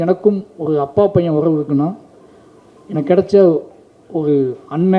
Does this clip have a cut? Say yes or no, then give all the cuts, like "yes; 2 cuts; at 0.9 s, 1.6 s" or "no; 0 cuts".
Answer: no; 0 cuts